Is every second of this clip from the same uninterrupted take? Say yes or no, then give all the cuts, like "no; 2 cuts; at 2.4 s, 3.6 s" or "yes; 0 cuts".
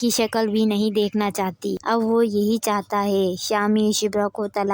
no; 1 cut; at 1.8 s